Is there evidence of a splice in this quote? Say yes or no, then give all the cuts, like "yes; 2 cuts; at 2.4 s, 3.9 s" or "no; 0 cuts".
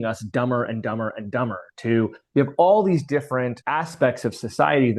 no; 0 cuts